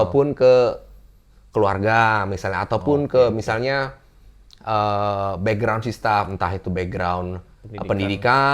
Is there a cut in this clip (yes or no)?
no